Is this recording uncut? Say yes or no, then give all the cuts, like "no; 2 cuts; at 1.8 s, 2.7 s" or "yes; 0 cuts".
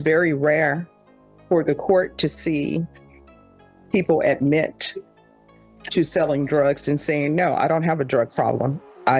yes; 0 cuts